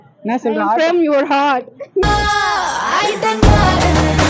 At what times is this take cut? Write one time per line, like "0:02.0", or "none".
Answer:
0:02.1